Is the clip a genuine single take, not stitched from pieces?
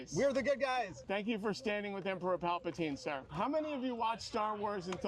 yes; 0 cuts

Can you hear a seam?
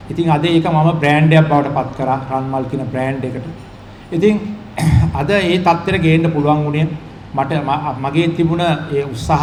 no; 0 cuts

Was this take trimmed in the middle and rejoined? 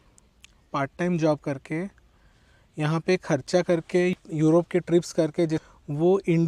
yes; 2 cuts; at 4.1 s, 5.6 s

